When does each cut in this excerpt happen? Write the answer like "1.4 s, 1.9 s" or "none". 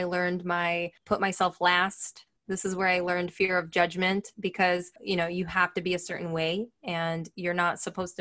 0.9 s, 5.0 s